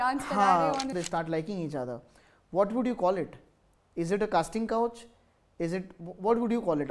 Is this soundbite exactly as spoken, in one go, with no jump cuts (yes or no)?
no